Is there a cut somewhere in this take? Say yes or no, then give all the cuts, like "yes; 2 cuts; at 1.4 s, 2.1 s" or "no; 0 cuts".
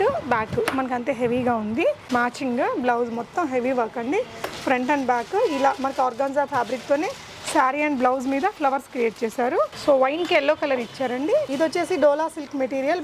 yes; 3 cuts; at 2.0 s, 9.8 s, 11.5 s